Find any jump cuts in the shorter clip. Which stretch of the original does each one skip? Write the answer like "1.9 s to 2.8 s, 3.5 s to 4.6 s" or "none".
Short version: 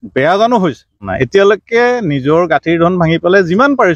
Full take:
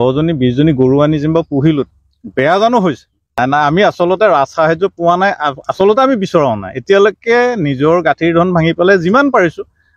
3.3 s to 6.6 s